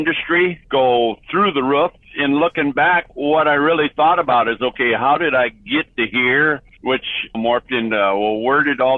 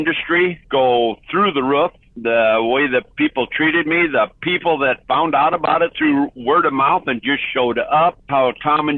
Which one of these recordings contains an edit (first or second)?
first